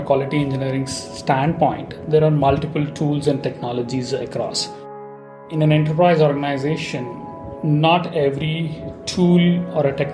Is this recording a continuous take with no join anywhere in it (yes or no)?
no